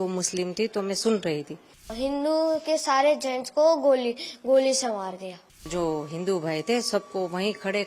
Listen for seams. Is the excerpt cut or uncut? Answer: cut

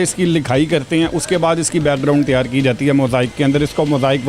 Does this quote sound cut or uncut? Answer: uncut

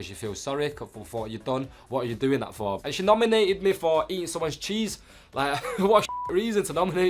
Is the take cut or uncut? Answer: cut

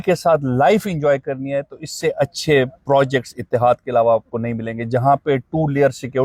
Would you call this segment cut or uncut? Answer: uncut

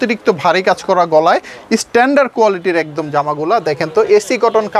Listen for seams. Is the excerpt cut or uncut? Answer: uncut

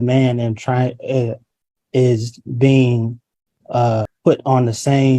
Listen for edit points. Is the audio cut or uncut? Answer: cut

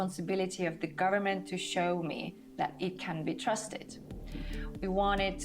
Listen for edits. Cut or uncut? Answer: uncut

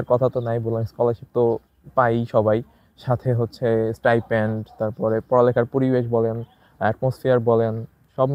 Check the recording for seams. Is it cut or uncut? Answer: uncut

